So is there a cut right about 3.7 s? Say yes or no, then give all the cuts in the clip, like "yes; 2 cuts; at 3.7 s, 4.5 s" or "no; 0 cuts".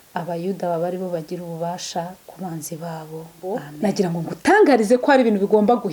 yes; 1 cut; at 3.7 s